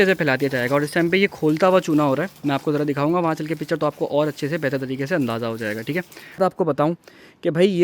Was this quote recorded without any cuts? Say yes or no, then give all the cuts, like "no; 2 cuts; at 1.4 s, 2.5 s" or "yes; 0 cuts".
no; 1 cut; at 6.4 s